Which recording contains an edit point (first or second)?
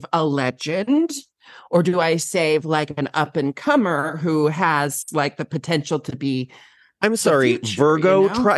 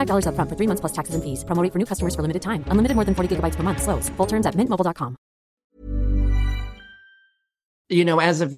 second